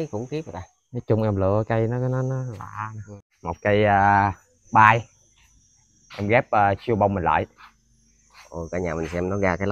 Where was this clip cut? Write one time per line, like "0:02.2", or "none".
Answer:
0:03.3